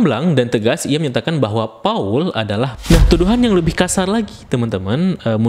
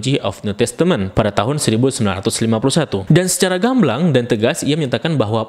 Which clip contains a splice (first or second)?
first